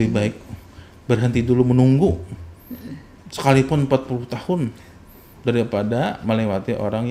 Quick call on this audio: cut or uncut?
uncut